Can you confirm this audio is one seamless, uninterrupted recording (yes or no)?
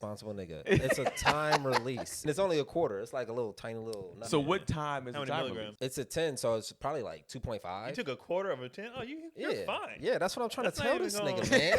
no